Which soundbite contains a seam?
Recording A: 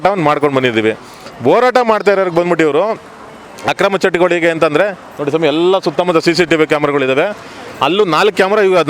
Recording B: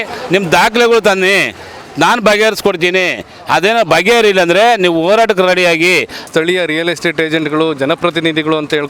B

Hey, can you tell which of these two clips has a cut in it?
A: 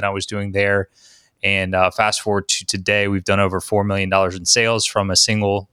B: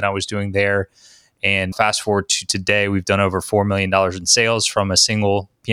B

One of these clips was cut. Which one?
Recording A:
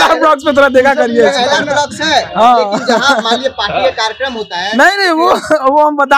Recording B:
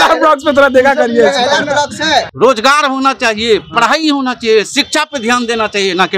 B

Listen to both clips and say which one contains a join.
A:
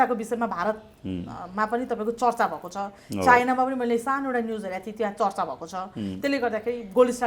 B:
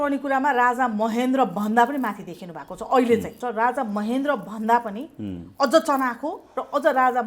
B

